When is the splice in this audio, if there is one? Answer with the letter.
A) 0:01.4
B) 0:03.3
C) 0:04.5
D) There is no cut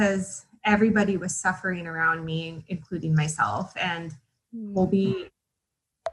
D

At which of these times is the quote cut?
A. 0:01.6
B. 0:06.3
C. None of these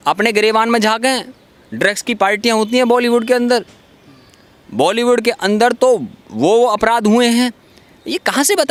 C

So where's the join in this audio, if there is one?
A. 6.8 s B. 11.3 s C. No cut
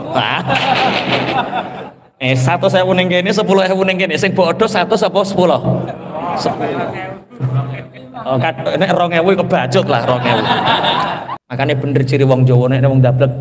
B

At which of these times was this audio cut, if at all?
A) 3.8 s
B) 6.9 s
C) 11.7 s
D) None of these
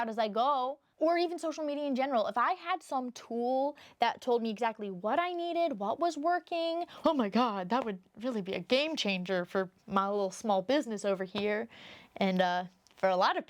B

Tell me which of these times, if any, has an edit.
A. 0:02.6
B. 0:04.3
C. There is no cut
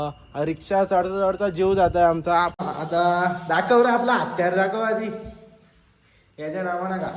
A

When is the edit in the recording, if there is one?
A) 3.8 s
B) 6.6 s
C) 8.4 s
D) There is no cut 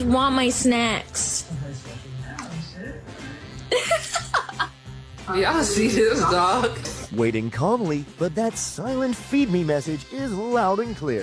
D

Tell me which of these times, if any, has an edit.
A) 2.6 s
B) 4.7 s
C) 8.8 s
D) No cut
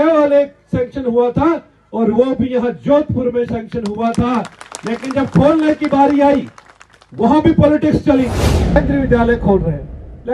C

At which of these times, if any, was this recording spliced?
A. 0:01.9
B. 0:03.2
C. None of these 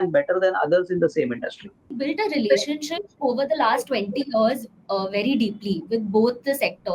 A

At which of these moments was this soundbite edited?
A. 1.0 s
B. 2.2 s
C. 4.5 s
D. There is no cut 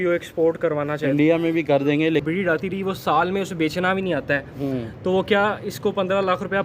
B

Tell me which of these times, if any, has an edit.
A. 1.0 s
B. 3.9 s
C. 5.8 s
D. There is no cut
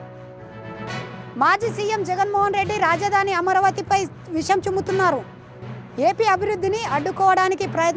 A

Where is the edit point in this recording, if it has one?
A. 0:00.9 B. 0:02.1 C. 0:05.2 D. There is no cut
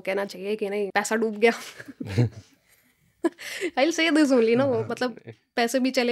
A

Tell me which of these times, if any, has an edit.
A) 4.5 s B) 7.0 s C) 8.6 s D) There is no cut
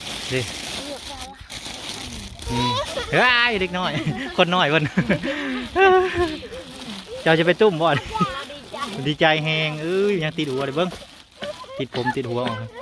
D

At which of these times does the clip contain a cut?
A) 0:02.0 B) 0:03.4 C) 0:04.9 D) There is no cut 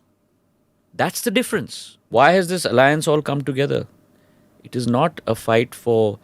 A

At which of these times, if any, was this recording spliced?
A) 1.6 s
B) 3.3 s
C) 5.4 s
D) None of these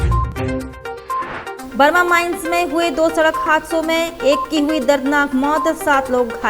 A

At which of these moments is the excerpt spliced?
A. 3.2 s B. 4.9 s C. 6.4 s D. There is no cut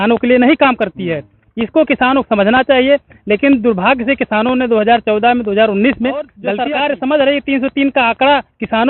C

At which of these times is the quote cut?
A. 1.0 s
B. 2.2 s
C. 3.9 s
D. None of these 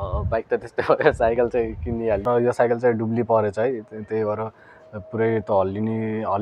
B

